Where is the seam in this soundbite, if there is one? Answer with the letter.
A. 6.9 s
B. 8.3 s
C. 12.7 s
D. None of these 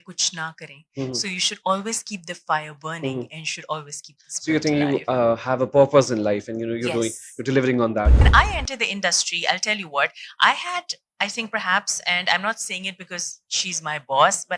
B